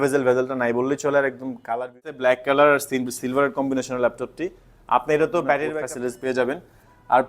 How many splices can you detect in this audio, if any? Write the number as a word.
two